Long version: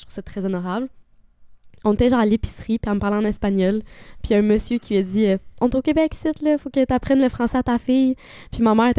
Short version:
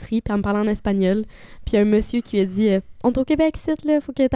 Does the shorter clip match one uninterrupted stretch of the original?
yes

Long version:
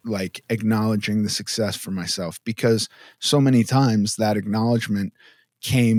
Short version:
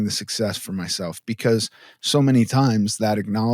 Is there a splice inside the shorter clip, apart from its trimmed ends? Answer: no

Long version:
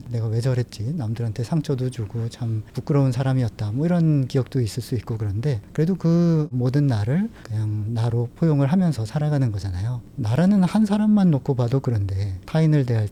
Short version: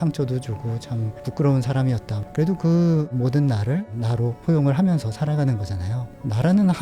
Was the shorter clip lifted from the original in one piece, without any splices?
no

